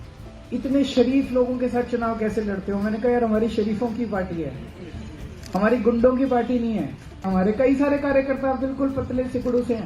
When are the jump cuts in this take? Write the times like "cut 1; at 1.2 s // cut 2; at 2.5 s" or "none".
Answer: cut 1; at 7.2 s